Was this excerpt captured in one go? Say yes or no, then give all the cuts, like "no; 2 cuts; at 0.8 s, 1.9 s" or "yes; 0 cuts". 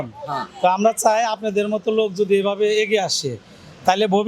yes; 0 cuts